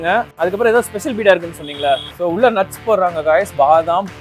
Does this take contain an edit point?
yes; 1 cut; at 2.1 s

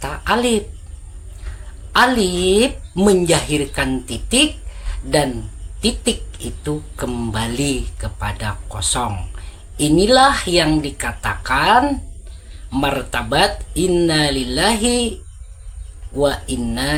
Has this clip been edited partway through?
no; 0 cuts

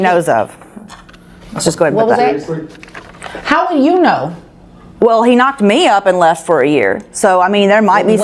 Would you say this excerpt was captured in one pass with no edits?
yes; 0 cuts

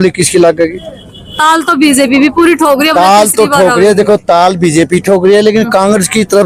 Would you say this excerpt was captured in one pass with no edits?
yes; 0 cuts

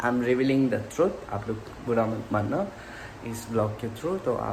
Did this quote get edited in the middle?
no; 0 cuts

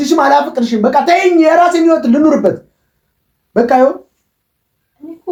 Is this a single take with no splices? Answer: yes; 0 cuts

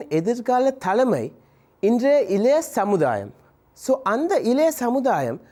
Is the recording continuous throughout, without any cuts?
yes; 0 cuts

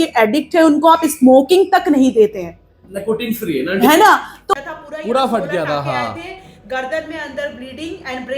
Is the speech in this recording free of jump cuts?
no; 1 cut; at 4.5 s

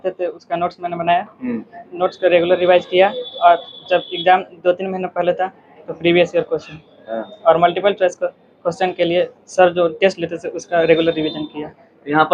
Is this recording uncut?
yes; 0 cuts

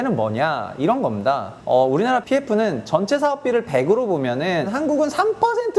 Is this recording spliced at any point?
yes; 2 cuts; at 1.5 s, 4.7 s

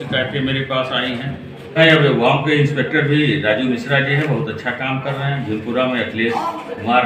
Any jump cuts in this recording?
yes; 1 cut; at 1.8 s

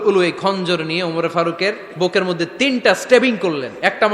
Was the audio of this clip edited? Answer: yes; 1 cut; at 1.9 s

